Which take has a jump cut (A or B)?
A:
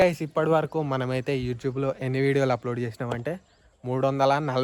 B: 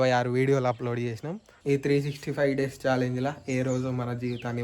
B